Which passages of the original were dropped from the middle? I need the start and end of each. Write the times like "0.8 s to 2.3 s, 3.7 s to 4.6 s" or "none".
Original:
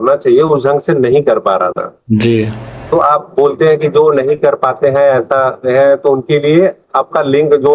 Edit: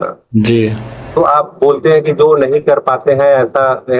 none